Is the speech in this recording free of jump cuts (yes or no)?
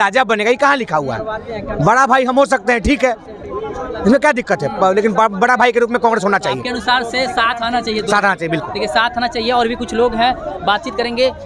yes